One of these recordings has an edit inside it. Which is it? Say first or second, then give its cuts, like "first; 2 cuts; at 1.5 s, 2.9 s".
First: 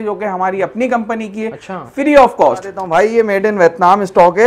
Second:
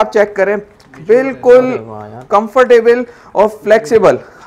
first; 1 cut; at 2.8 s